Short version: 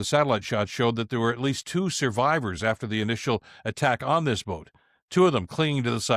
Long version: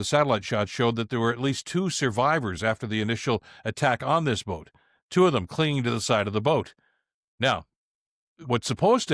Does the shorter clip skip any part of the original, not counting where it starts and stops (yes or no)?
no